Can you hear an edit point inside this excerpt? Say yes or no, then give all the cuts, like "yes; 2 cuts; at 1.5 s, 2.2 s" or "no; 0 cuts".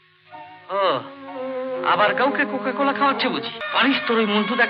yes; 1 cut; at 3.6 s